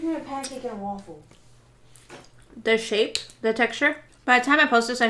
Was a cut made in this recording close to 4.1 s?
yes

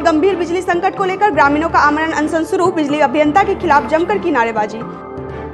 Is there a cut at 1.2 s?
no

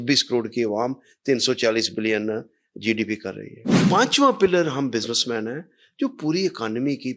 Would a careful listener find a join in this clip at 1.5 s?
no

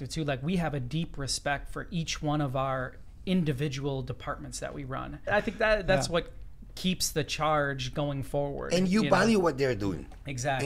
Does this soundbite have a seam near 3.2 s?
no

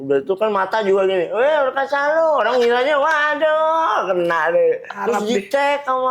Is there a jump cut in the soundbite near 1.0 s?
no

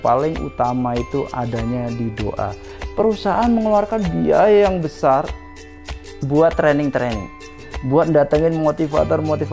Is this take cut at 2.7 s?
yes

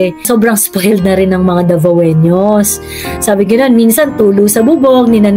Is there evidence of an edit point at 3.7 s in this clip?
no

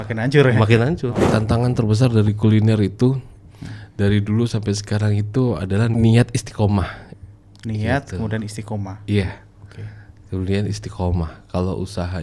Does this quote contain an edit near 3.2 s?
no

